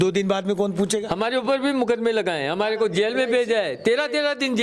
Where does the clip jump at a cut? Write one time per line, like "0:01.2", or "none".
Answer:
0:01.1